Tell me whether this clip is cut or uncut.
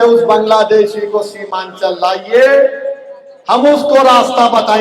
uncut